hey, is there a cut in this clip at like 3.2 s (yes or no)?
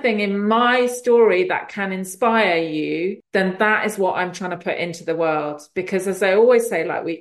yes